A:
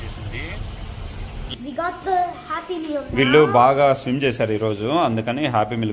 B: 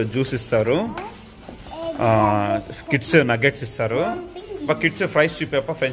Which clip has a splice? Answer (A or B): A